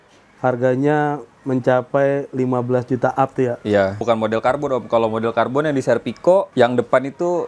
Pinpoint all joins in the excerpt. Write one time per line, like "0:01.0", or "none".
0:04.0
0:06.5